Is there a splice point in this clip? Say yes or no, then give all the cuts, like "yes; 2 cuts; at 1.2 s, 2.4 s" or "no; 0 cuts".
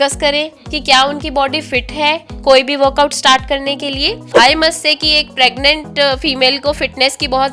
yes; 1 cut; at 4.3 s